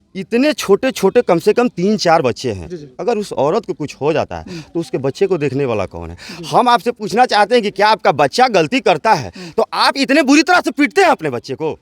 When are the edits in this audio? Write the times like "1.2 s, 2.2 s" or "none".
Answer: none